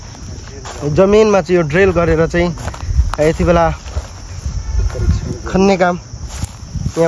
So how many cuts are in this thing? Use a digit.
0